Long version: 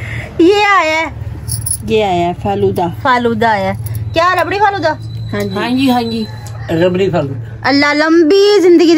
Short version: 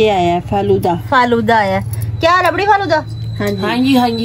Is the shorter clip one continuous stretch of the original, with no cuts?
yes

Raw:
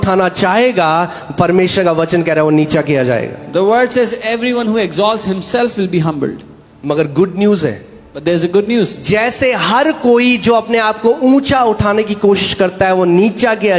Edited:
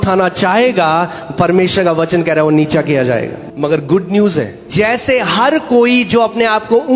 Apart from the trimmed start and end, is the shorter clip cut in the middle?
yes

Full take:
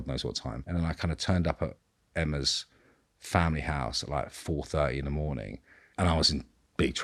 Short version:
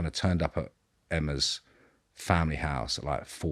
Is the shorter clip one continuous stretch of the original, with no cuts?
yes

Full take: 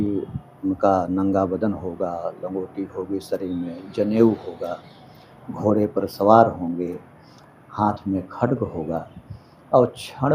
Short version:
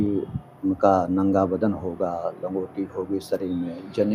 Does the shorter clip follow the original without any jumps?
yes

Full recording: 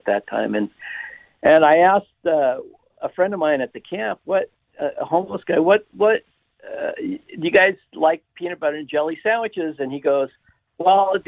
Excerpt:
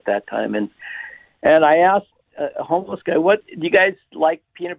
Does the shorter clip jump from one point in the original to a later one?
yes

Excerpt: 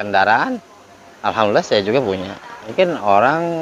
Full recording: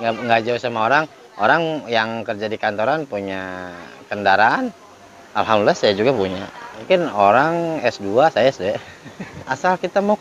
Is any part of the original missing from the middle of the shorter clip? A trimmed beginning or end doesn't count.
no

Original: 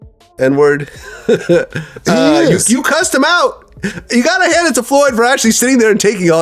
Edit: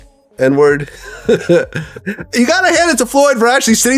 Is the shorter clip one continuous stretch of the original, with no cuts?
no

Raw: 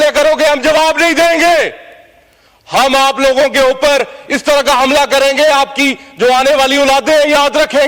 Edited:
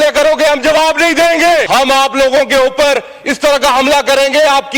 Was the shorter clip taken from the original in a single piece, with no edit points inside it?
no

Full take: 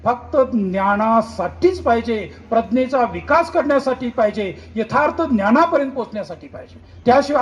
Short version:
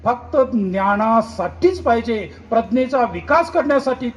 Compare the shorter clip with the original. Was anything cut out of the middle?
no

